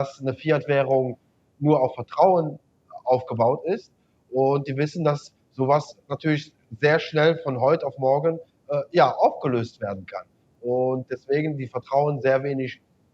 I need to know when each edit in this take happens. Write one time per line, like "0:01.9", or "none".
none